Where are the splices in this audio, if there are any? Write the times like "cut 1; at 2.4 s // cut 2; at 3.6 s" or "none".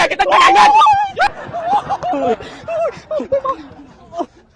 cut 1; at 1.3 s